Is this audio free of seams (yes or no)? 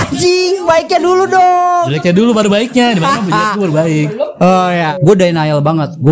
no